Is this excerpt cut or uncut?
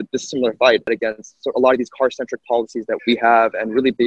cut